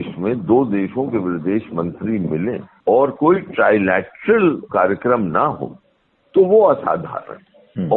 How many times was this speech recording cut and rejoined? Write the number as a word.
one